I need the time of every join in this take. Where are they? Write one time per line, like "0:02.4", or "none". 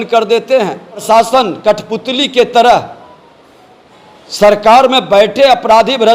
0:01.0